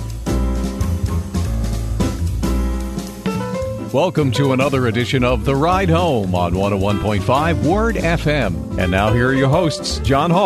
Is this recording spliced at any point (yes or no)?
no